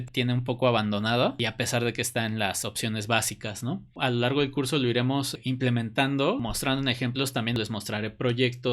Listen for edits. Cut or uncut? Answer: cut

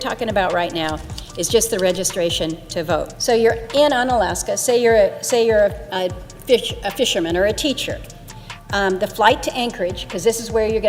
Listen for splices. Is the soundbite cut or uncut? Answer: uncut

